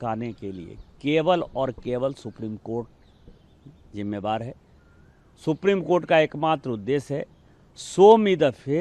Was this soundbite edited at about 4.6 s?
no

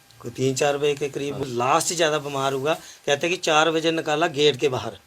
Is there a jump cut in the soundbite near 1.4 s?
yes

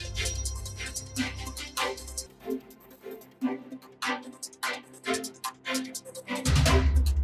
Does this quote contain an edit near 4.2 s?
no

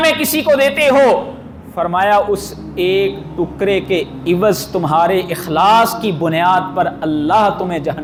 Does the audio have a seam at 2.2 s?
no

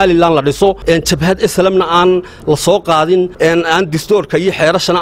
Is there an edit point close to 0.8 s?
yes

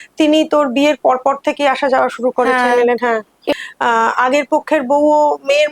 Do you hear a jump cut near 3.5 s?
yes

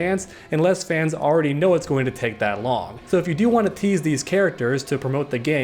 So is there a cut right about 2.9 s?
yes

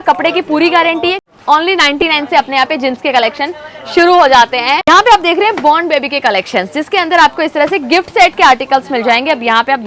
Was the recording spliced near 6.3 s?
no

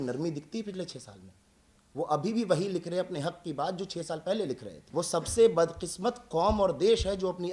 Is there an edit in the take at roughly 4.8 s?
yes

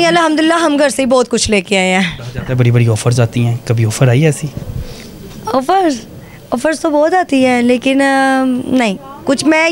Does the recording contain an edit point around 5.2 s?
no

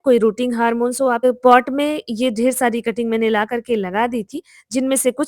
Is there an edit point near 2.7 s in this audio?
no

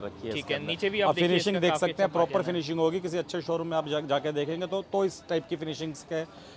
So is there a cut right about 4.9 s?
no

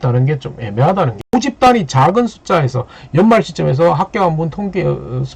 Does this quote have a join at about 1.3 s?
yes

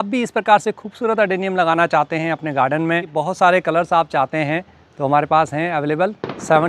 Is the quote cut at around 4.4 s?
no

